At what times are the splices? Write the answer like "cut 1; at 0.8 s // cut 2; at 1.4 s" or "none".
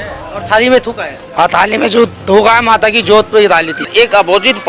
cut 1; at 3.8 s